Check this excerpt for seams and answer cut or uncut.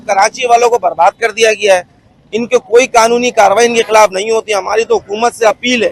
uncut